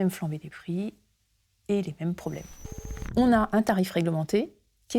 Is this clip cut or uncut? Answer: cut